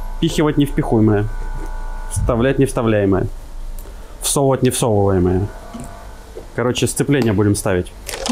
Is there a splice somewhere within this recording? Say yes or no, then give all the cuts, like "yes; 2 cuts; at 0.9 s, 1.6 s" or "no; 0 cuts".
no; 0 cuts